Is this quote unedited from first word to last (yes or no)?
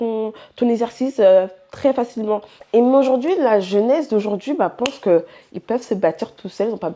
no